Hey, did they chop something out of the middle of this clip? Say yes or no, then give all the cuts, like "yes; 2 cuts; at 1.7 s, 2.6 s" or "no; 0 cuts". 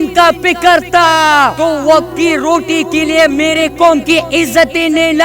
yes; 1 cut; at 1.5 s